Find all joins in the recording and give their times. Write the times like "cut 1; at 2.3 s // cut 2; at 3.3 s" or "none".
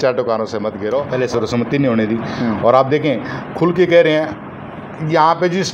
cut 1; at 1.1 s